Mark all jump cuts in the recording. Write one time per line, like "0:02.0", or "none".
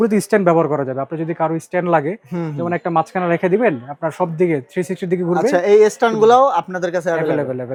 none

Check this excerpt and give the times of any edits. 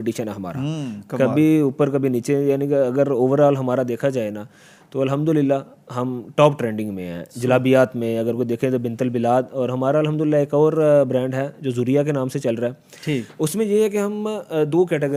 none

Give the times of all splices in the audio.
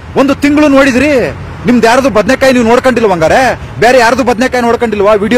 none

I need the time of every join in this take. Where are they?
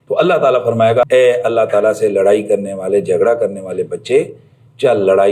0:01.0

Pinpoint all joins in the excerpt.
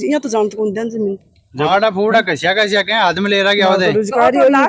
0:01.7

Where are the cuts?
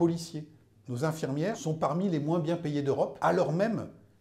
0:01.6
0:03.1

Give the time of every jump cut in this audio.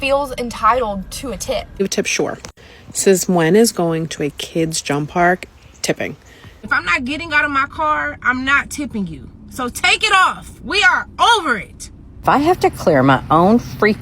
0:01.8
0:06.5
0:12.2

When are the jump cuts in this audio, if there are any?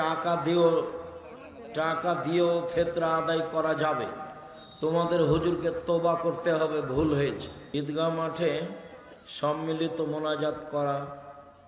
0:07.6

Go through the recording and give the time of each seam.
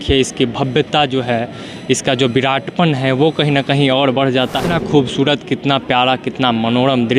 0:04.7

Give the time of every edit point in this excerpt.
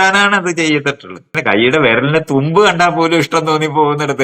0:01.3

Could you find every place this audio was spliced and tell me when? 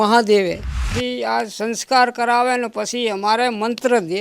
0:00.9

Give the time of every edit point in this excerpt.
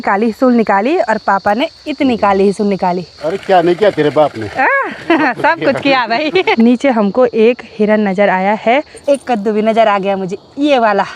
0:03.1
0:06.5
0:08.9

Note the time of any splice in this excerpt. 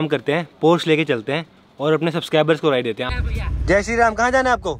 0:03.1

